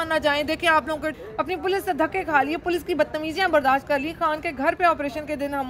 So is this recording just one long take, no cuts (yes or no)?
no